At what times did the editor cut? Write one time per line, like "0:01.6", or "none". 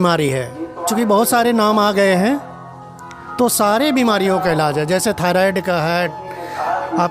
none